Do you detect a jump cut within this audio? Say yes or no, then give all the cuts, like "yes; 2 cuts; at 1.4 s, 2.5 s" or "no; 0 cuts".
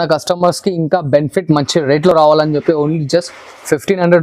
no; 0 cuts